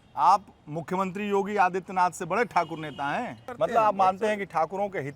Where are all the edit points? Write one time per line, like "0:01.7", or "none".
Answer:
0:03.5